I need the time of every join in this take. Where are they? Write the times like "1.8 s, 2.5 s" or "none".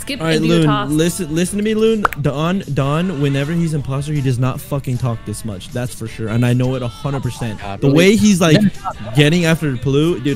none